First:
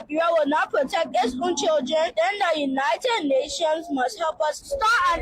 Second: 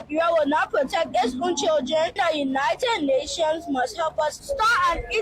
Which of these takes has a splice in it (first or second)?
second